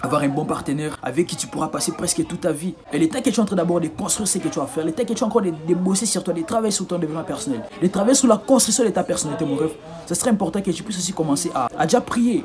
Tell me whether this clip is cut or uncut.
cut